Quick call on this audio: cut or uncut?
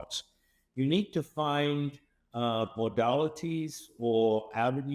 uncut